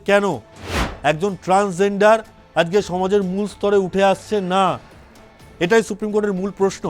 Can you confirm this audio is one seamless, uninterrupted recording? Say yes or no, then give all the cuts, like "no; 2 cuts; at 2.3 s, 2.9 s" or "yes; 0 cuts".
yes; 0 cuts